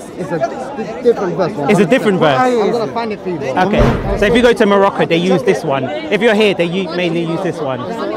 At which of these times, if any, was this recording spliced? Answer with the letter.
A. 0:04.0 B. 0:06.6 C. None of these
A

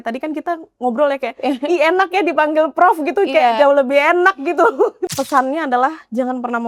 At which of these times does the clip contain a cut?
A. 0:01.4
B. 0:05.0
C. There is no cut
B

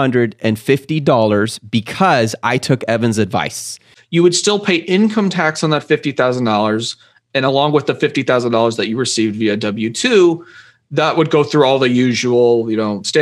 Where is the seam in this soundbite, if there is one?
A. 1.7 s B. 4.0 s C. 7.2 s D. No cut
B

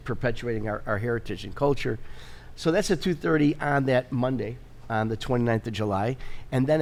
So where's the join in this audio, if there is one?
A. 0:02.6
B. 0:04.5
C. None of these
C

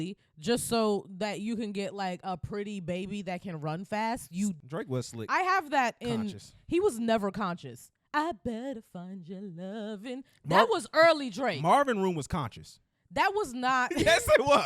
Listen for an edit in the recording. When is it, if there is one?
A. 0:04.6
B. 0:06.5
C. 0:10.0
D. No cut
A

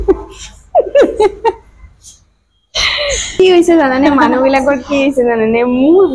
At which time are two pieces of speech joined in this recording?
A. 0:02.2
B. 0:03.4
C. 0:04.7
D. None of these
B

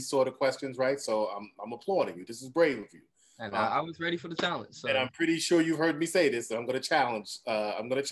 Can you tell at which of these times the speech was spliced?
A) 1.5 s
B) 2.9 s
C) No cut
C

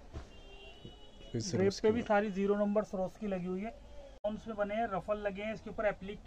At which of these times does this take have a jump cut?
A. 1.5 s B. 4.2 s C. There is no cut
B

